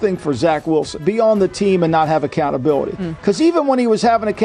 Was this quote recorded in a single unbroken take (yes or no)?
no